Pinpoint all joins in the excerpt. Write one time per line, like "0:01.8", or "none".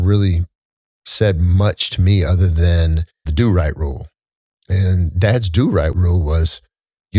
0:03.3
0:06.0